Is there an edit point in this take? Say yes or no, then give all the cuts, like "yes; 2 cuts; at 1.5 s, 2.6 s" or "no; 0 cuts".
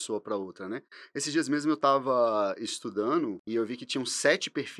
yes; 1 cut; at 3.4 s